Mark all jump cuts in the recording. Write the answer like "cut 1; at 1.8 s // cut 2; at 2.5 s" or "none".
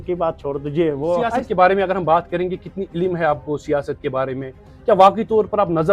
cut 1; at 1.3 s